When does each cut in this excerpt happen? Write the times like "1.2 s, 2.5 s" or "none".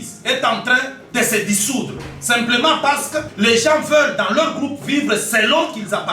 3.3 s